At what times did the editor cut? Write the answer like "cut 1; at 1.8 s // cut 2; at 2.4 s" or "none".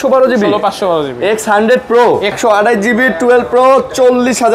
cut 1; at 2.3 s